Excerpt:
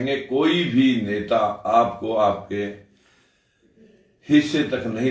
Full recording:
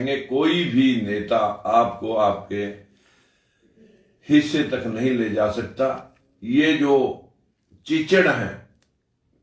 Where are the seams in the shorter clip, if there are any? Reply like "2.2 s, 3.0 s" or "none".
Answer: none